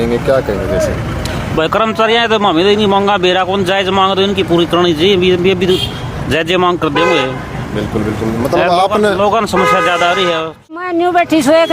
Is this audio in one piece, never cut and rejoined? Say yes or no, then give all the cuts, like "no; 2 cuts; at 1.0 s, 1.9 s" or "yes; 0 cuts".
no; 1 cut; at 10.8 s